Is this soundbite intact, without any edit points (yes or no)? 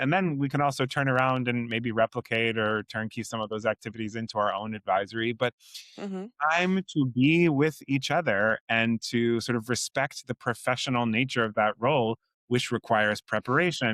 yes